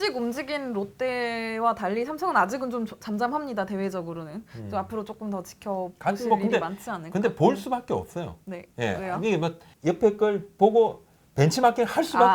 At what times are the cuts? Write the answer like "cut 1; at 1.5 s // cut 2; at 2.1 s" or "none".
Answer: none

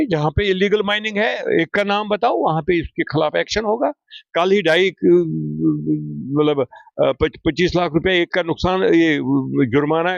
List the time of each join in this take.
none

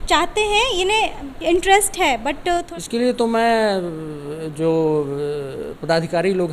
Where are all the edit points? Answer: cut 1; at 2.7 s

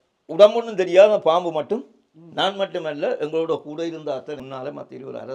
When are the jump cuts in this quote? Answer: cut 1; at 4.4 s

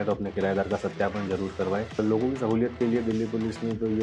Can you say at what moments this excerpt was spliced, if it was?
cut 1; at 1.9 s

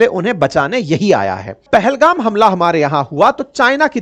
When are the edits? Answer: cut 1; at 1.7 s

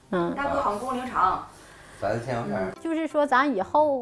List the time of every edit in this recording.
cut 1; at 2.8 s

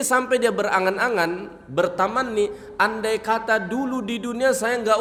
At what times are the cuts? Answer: none

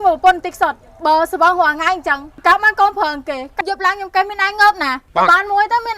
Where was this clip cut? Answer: cut 1; at 3.5 s

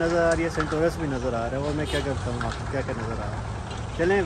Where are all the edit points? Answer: none

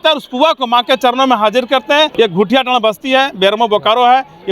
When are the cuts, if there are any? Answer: cut 1; at 2.1 s

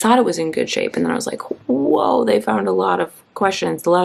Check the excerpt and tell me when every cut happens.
none

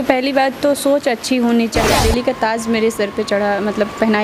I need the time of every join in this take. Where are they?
cut 1; at 1.9 s

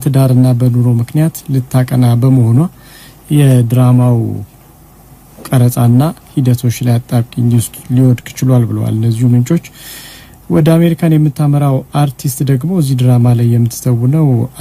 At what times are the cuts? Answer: cut 1; at 12.5 s

